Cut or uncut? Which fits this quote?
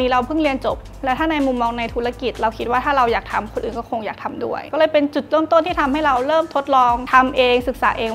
uncut